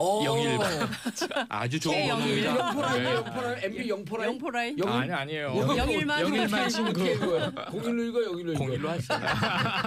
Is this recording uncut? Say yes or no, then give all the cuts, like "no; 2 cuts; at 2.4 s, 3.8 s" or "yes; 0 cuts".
yes; 0 cuts